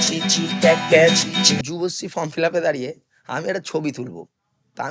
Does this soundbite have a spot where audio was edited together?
yes; 1 cut; at 1.6 s

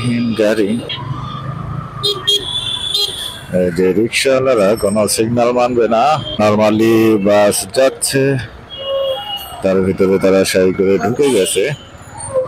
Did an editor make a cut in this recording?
yes; 2 cuts; at 0.9 s, 6.4 s

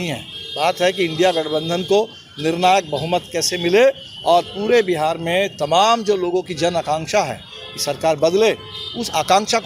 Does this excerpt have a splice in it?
no; 0 cuts

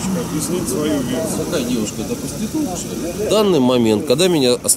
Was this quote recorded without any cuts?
no; 2 cuts; at 1.5 s, 3.2 s

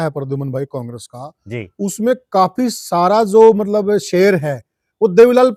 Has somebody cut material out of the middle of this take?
no; 0 cuts

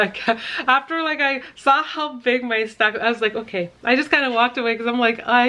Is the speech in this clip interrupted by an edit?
no; 0 cuts

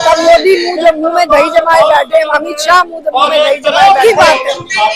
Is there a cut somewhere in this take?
yes; 1 cut; at 4.0 s

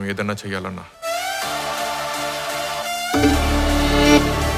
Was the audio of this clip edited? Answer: no; 0 cuts

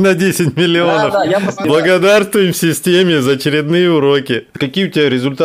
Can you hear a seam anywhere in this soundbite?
yes; 2 cuts; at 1.6 s, 4.5 s

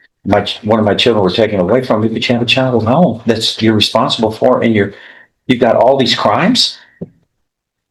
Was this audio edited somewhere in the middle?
no; 0 cuts

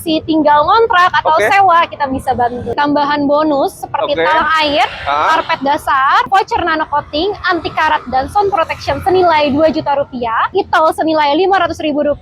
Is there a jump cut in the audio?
yes; 3 cuts; at 2.7 s, 6.3 s, 10.5 s

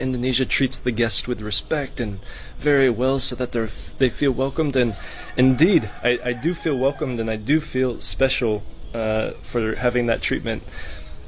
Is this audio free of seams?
yes; 0 cuts

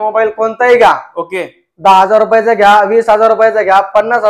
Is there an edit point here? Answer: no; 0 cuts

